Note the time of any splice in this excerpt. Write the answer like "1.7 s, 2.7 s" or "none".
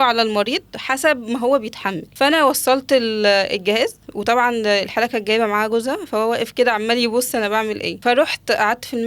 2.0 s, 7.9 s